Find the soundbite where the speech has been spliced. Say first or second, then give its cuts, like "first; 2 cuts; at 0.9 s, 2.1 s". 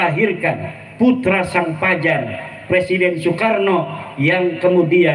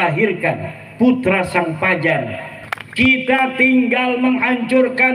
second; 1 cut; at 2.5 s